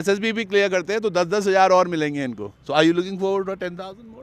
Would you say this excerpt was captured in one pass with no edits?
yes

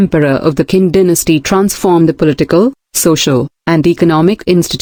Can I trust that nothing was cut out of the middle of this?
yes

